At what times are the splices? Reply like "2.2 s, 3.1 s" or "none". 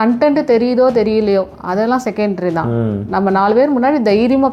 none